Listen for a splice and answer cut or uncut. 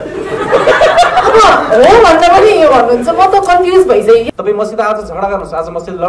cut